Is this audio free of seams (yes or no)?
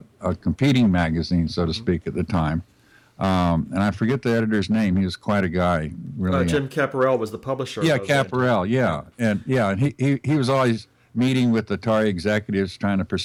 yes